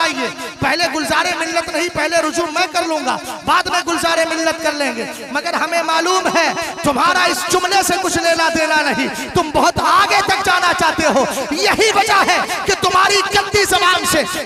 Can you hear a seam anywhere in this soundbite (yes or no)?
no